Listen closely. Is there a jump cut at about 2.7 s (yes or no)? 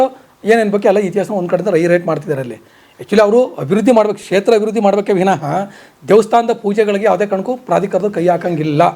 no